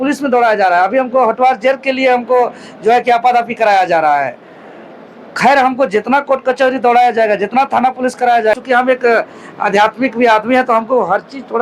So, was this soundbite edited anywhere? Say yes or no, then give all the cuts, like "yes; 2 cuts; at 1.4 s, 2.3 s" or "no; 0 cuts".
yes; 1 cut; at 8.6 s